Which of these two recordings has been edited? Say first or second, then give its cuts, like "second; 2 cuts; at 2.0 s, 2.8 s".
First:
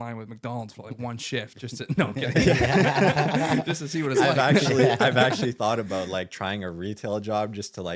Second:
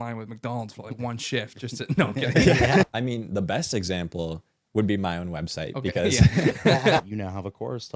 second; 2 cuts; at 2.8 s, 7.0 s